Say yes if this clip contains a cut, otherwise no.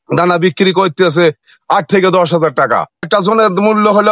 yes